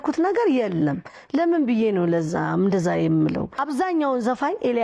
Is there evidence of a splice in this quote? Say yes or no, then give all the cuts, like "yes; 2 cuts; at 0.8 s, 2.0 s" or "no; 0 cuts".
no; 0 cuts